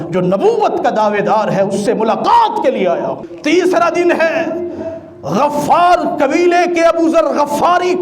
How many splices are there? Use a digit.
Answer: 1